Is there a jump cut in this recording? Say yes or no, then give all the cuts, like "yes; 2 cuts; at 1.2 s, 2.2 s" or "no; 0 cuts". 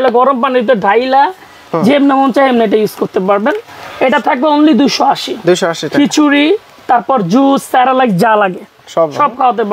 no; 0 cuts